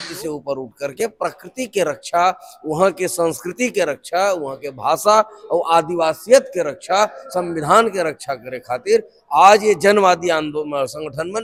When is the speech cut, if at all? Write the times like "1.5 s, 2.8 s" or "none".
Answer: none